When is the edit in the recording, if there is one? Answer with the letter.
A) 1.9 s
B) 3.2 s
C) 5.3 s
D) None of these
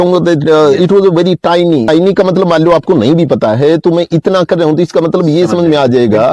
A